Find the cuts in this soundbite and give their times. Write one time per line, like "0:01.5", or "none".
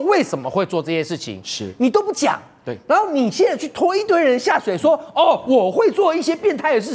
none